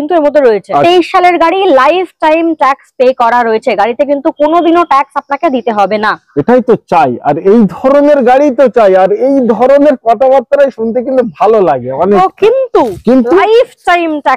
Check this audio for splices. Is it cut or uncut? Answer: cut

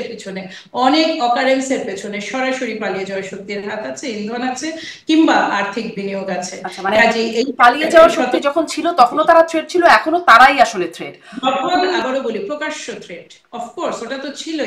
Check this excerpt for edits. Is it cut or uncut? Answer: cut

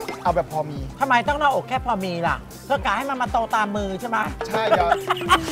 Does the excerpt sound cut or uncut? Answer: uncut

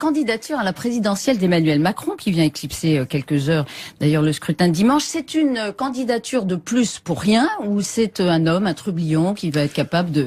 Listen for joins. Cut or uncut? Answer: cut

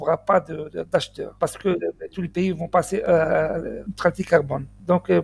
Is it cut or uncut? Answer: cut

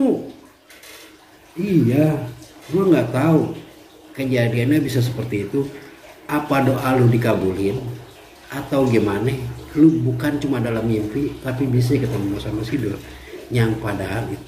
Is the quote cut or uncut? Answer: uncut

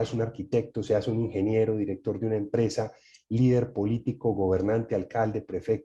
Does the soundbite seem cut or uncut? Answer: uncut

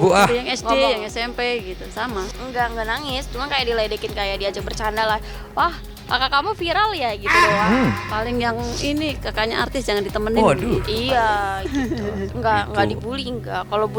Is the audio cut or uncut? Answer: uncut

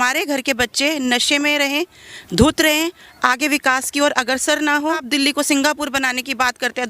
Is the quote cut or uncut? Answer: cut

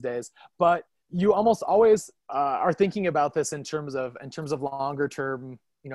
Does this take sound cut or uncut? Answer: cut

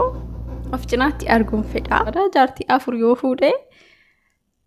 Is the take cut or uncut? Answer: cut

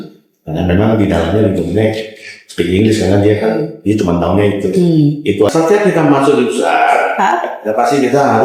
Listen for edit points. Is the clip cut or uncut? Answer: cut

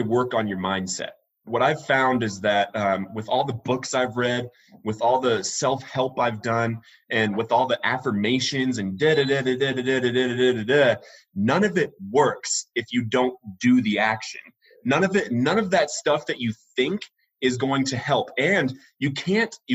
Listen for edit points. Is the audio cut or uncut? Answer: cut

